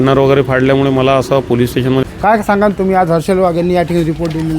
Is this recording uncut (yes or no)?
no